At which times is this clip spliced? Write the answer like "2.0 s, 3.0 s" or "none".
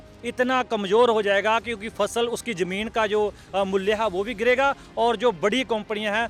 none